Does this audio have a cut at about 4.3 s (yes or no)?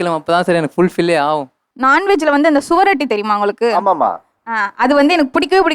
no